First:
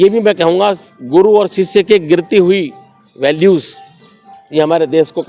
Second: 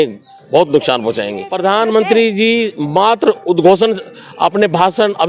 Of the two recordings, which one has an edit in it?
second; 1 cut; at 1.4 s

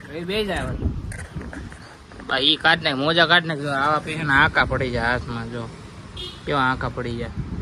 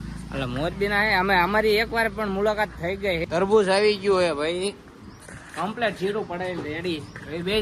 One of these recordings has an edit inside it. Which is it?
second; 1 cut; at 3.3 s

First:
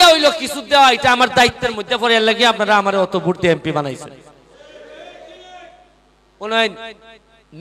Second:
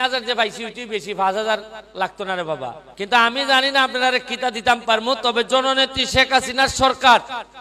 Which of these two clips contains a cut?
second; 1 cut; at 2.8 s

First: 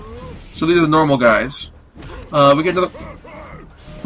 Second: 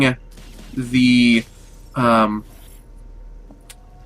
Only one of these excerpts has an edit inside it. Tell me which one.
second; 1 cut; at 3.0 s

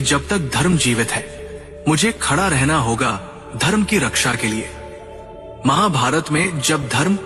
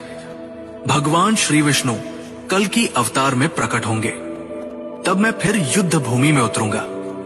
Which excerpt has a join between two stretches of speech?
second; 1 cut; at 4.6 s

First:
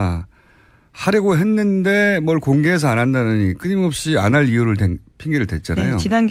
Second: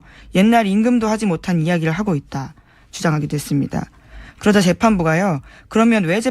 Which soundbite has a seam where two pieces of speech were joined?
second; 1 cut; at 4.8 s

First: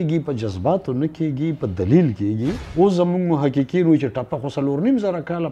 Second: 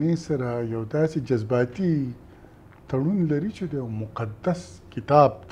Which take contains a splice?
first; 1 cut; at 2.6 s

